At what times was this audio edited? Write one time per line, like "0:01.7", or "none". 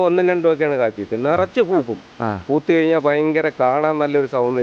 none